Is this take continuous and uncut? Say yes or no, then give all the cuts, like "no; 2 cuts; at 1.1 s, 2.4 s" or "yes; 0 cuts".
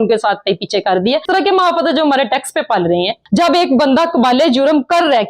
no; 1 cut; at 1.2 s